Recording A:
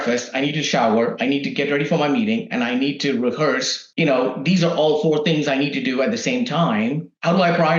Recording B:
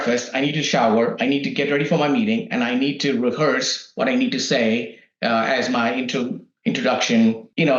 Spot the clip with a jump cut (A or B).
A